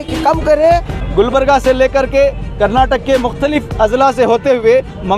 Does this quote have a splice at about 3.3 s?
no; 1 cut; at 1.0 s

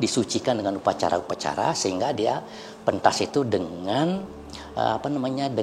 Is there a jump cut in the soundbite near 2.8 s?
no; 0 cuts

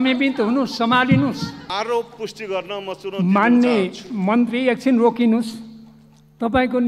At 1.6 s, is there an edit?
yes; 1 cut; at 1.6 s

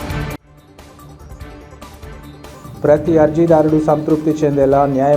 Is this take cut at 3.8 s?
no; 1 cut; at 1.2 s

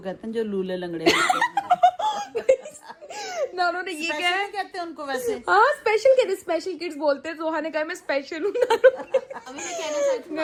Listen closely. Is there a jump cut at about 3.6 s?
no; 0 cuts

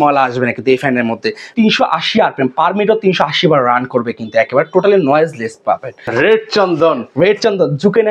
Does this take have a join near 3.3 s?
no; 2 cuts; at 1.5 s, 6.1 s

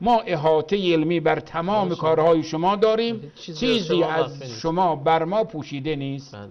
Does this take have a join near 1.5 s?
no; 0 cuts

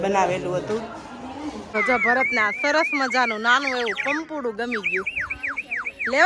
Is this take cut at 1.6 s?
yes; 1 cut; at 1.6 s

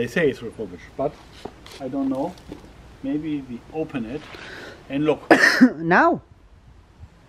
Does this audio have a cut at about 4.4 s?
no; 0 cuts

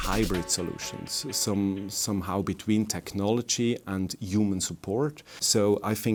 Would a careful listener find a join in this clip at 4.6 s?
no; 0 cuts

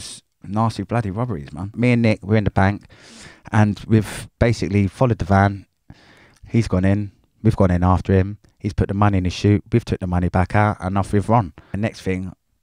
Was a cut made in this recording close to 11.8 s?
yes; 2 cuts; at 1.8 s, 11.8 s

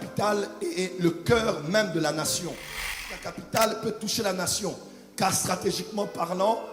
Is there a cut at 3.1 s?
yes; 1 cut; at 3.1 s

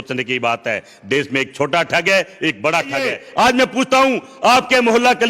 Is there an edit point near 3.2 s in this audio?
yes; 1 cut; at 3.2 s

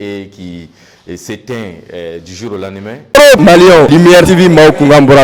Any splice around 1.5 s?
no; 1 cut; at 3.0 s

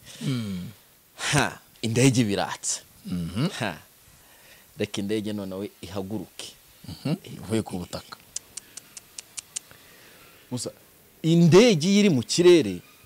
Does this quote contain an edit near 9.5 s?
no; 1 cut; at 1.7 s

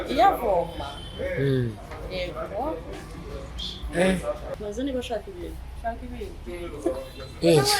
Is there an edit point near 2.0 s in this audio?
no; 1 cut; at 4.5 s

